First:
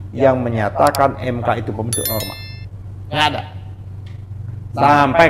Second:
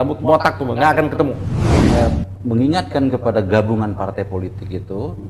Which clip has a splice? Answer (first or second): second